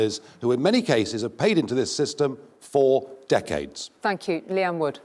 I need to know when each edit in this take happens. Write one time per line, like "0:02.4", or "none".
0:03.8